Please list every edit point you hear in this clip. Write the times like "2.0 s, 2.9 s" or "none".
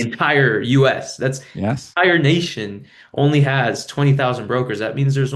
none